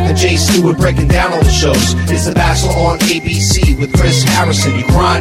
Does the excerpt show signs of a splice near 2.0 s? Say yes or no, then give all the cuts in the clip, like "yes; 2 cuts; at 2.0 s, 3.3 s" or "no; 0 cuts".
no; 0 cuts